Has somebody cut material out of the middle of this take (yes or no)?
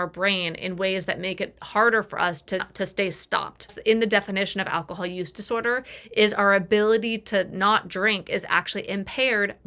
yes